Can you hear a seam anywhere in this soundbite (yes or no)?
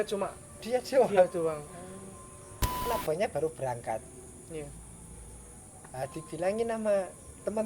yes